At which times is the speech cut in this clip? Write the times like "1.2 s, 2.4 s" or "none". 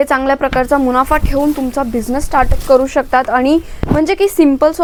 none